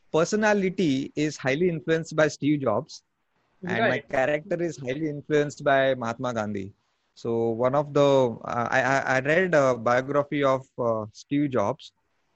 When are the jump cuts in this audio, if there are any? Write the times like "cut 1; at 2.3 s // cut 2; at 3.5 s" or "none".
none